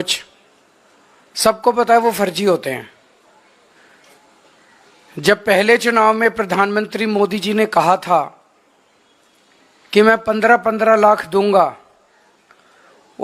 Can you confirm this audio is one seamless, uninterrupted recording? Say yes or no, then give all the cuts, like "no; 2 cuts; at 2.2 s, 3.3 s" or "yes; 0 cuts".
no; 1 cut; at 6.2 s